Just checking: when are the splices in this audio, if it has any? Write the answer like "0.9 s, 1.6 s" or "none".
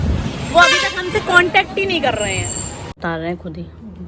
2.9 s